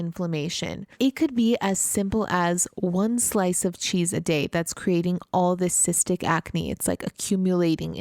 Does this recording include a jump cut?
yes; 1 cut; at 0.9 s

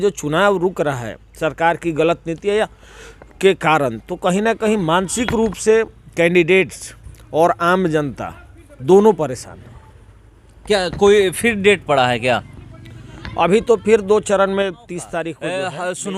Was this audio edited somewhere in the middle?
no; 0 cuts

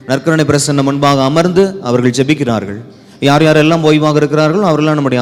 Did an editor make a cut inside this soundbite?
no; 0 cuts

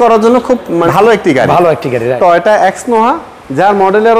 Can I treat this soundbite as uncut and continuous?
no; 2 cuts; at 0.9 s, 2.1 s

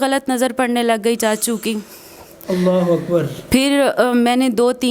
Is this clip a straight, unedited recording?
yes; 0 cuts

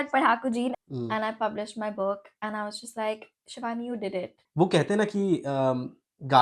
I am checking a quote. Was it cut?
yes; 2 cuts; at 0.7 s, 4.4 s

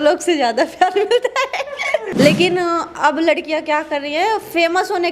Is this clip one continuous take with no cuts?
no; 1 cut; at 2.1 s

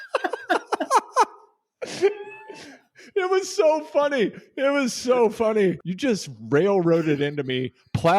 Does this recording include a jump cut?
yes; 1 cut; at 5.9 s

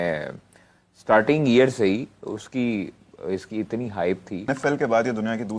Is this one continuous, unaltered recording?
no; 1 cut; at 4.5 s

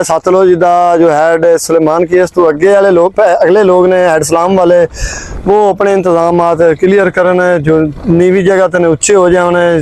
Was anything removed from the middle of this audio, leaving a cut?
no; 0 cuts

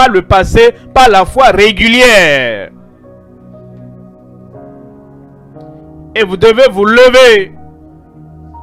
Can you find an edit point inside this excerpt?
yes; 2 cuts; at 2.7 s, 6.0 s

